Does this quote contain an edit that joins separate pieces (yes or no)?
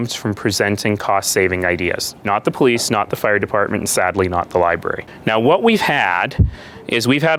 no